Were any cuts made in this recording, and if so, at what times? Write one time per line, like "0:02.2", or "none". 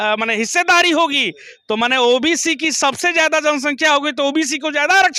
none